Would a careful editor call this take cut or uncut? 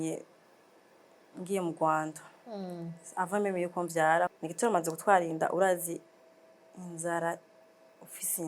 cut